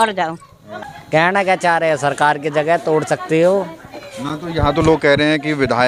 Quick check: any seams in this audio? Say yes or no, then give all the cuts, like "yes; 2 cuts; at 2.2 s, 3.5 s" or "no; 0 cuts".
no; 0 cuts